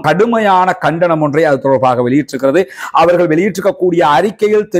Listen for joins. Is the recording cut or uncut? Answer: uncut